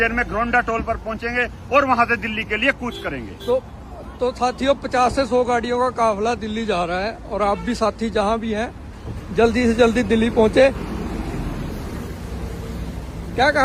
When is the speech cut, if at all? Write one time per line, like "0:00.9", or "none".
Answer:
none